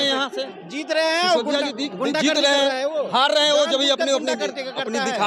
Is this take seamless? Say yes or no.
yes